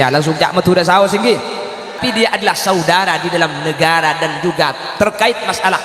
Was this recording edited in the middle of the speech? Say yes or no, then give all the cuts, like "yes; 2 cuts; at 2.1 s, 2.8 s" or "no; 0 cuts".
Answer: yes; 1 cut; at 2.0 s